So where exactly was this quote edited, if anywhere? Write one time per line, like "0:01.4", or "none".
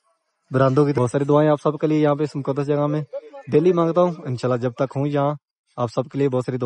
0:00.9